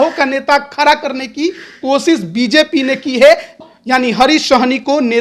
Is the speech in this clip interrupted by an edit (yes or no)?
yes